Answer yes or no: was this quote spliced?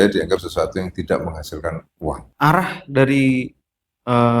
yes